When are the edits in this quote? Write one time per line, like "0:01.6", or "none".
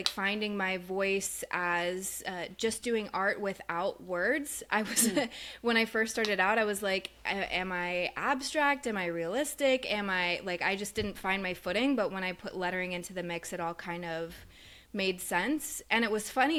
none